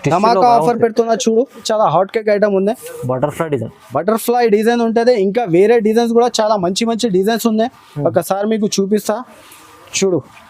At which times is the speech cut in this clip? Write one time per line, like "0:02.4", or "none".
0:01.6